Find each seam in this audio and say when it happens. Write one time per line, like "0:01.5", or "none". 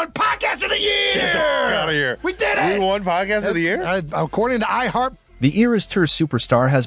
0:05.2